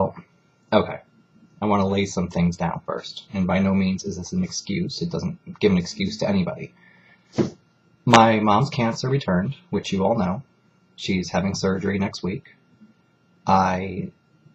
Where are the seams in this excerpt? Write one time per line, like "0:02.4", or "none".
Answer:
none